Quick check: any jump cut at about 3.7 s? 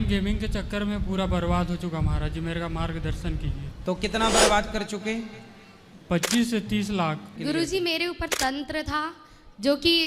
yes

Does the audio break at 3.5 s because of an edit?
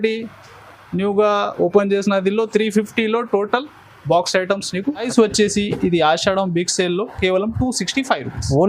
no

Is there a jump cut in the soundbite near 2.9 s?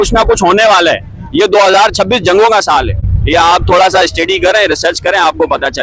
no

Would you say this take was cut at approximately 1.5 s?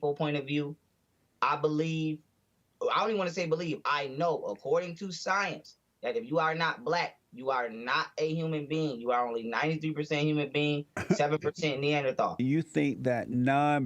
no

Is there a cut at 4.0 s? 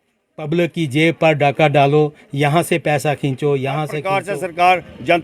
yes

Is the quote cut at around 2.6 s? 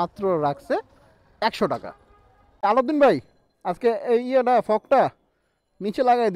yes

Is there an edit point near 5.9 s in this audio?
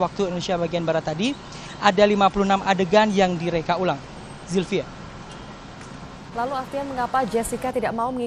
no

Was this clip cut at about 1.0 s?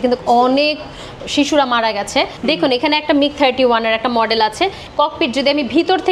no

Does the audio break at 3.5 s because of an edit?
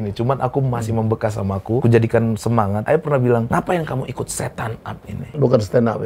yes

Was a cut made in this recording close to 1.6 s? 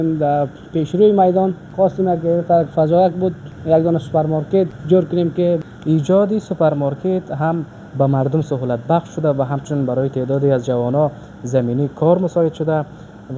yes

